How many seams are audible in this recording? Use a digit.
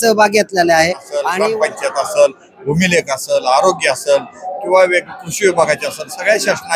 1